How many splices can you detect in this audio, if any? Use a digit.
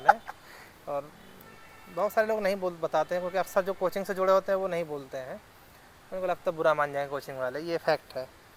0